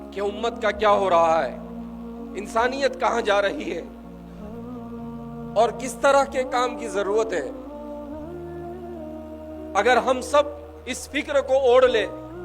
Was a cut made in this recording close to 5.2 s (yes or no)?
yes